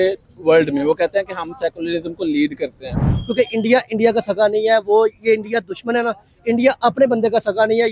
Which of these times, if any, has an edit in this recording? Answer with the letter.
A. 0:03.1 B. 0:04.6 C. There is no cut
A